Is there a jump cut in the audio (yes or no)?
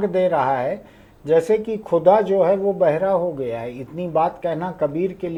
no